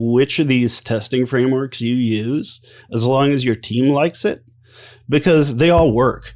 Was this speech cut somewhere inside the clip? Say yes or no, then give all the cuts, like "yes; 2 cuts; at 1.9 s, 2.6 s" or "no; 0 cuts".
no; 0 cuts